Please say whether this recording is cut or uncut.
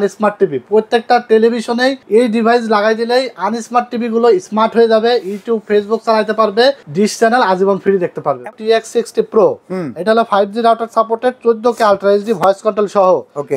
cut